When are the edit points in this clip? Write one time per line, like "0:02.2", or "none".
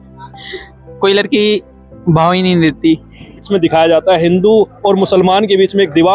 0:03.5